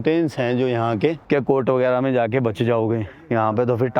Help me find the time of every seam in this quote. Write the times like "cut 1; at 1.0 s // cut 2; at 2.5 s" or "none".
cut 1; at 1.2 s